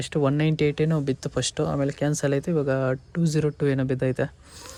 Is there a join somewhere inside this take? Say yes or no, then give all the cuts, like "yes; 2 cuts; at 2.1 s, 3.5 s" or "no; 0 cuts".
no; 0 cuts